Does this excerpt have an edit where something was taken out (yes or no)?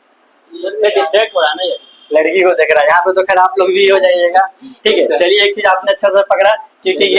no